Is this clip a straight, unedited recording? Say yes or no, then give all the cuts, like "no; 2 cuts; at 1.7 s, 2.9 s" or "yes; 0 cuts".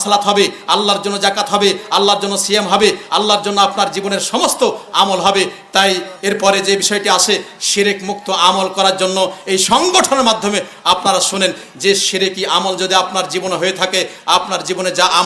yes; 0 cuts